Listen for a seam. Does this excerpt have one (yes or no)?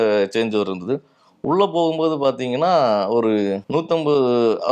yes